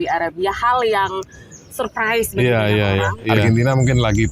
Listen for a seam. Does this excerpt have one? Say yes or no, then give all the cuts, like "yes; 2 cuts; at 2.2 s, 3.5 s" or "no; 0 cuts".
yes; 1 cut; at 3.4 s